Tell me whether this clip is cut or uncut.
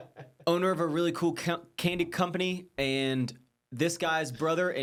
uncut